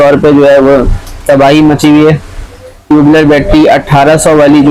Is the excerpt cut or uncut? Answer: uncut